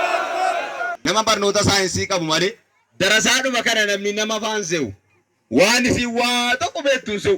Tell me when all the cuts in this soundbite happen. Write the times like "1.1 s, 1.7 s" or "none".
0.9 s

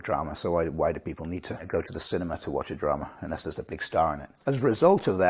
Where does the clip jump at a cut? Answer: 1.7 s, 4.3 s

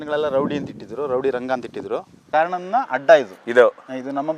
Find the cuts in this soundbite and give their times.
2.2 s, 3.4 s

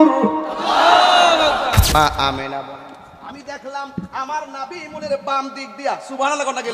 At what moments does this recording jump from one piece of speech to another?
1.9 s

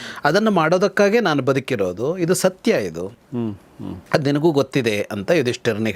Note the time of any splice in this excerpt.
none

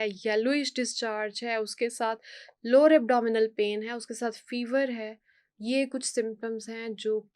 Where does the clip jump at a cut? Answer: none

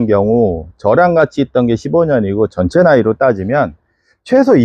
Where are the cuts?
none

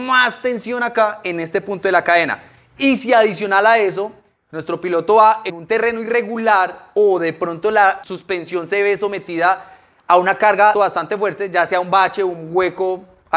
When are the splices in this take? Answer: 5.5 s, 8.1 s, 10.7 s

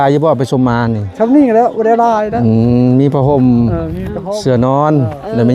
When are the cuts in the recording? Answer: 1.1 s

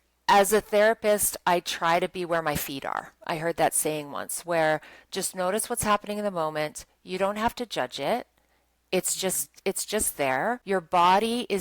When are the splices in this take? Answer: 10.6 s

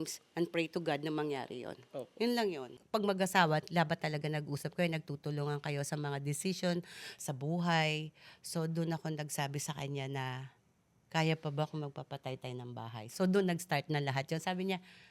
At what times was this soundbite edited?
2.7 s

